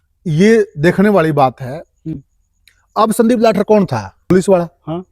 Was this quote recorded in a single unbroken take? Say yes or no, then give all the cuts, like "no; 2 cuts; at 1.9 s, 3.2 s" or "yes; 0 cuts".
no; 1 cut; at 2.2 s